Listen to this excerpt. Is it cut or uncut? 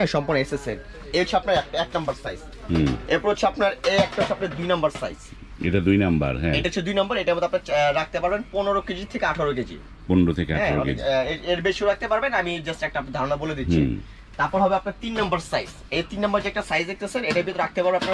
uncut